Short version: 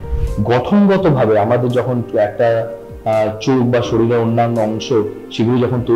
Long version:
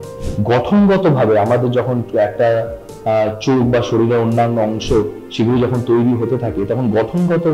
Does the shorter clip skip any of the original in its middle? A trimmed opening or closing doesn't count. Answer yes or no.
no